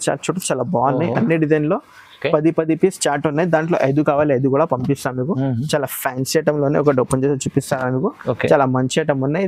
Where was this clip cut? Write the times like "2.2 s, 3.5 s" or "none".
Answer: none